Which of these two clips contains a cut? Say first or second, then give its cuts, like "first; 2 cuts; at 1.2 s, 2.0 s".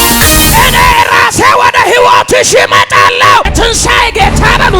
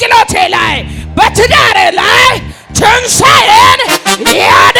first; 1 cut; at 3.5 s